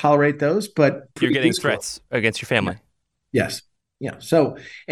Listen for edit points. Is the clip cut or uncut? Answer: cut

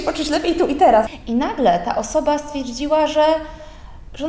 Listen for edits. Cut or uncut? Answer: cut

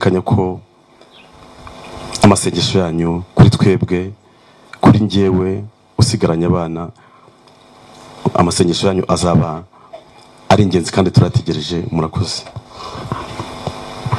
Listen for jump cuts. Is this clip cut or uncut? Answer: uncut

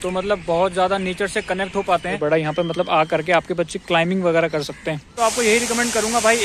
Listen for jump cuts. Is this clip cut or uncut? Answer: cut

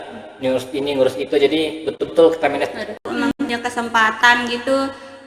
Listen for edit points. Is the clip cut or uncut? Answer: cut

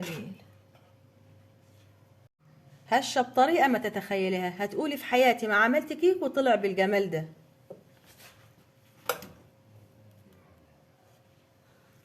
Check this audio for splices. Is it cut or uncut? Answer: cut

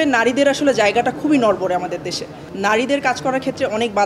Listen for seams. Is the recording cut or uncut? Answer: cut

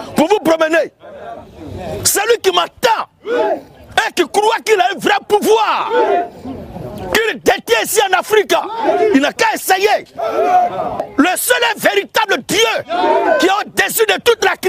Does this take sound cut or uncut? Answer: uncut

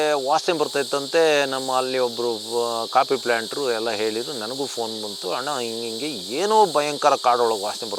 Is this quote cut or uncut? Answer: uncut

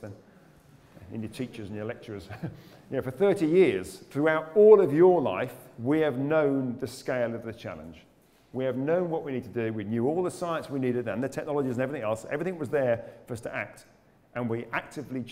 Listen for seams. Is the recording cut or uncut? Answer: uncut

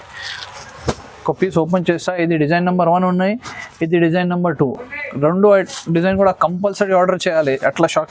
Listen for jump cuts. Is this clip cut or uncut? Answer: uncut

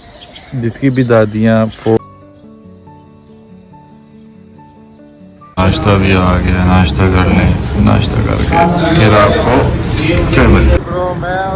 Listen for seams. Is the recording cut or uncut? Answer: cut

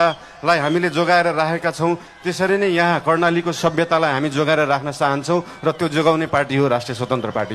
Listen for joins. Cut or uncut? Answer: uncut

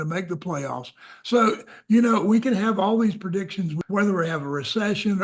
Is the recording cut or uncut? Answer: cut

